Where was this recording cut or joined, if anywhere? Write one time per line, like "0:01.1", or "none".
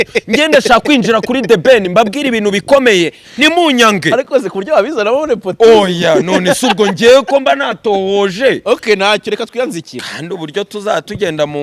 none

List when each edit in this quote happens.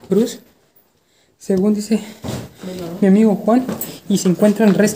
none

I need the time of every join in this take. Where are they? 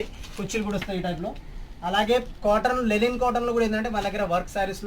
none

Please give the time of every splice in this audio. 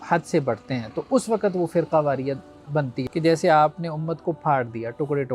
0:03.0

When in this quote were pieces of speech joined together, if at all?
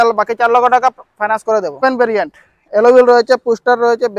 0:01.8

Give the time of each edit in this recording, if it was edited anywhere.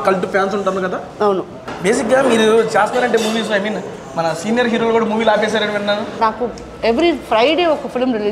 0:01.7
0:06.2

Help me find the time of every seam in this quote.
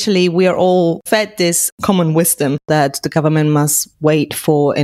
0:01.5
0:02.7

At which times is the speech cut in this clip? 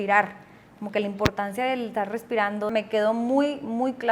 0:02.7

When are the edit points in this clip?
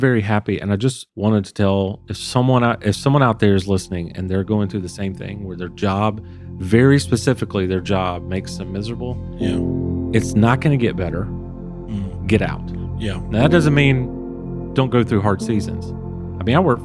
0:01.0

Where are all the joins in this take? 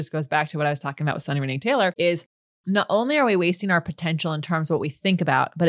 0:01.9

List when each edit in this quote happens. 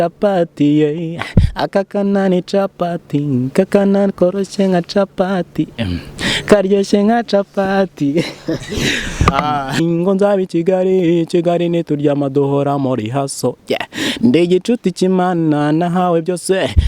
0:09.8

